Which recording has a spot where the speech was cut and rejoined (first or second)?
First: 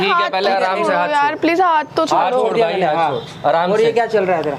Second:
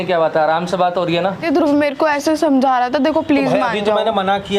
second